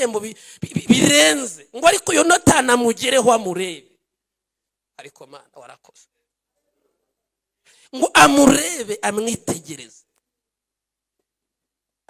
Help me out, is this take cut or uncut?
uncut